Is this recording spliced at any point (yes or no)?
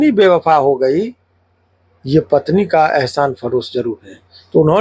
no